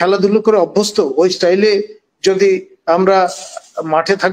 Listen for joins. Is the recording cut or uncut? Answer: uncut